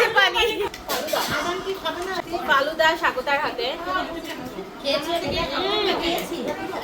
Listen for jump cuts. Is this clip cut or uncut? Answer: cut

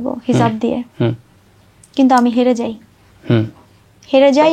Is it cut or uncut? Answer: uncut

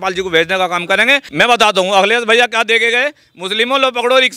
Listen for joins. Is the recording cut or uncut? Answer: cut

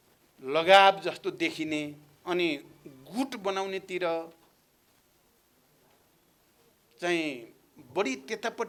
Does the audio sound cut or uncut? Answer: uncut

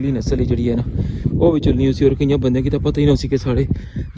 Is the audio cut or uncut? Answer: uncut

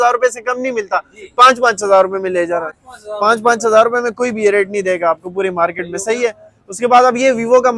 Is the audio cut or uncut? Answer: uncut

